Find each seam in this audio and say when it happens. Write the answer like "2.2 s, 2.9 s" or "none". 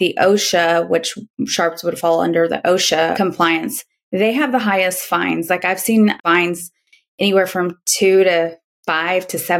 3.1 s, 6.2 s